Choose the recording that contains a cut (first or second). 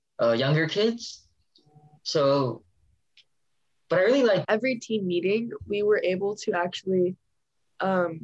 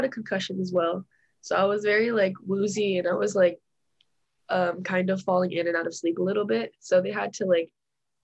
first